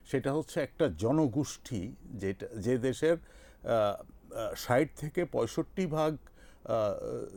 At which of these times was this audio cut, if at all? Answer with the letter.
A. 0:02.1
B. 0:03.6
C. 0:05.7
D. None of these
D